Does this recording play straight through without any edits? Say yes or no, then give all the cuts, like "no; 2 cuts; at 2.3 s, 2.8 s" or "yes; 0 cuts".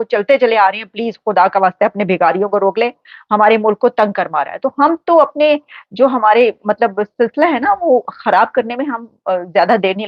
yes; 0 cuts